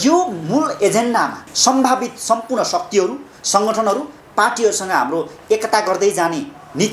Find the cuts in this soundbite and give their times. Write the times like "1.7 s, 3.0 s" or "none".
1.5 s